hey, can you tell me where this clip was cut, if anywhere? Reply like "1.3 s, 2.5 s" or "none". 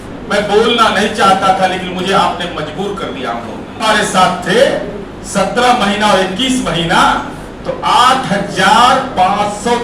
3.7 s